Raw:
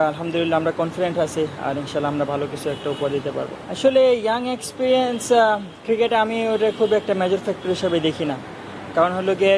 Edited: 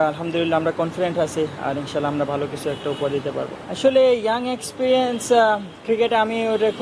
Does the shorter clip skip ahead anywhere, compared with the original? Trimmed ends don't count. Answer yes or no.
no